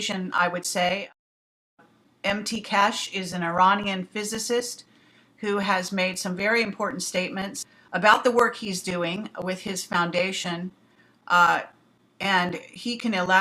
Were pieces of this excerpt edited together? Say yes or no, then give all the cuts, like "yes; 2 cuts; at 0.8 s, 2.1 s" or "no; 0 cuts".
no; 0 cuts